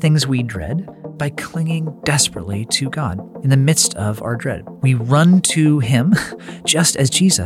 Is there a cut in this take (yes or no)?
yes